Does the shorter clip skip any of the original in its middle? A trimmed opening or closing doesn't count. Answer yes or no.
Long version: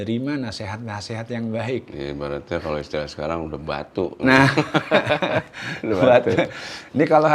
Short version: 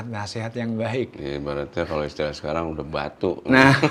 no